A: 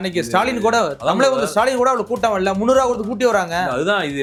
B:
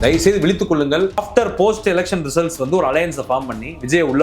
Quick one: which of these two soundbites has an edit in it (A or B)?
B